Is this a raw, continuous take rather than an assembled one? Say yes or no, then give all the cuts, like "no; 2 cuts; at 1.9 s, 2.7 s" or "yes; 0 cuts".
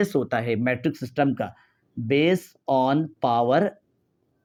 yes; 0 cuts